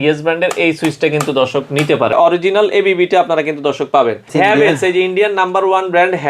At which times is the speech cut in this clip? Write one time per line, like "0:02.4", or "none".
0:02.1
0:04.3